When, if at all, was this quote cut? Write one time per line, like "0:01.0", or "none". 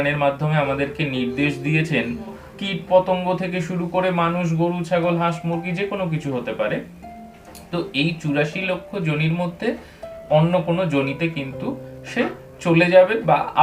0:02.3